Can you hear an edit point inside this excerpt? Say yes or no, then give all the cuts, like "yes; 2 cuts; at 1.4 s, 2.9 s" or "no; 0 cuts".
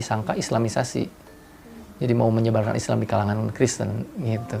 no; 0 cuts